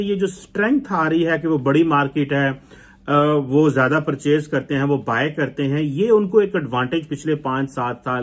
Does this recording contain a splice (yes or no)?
no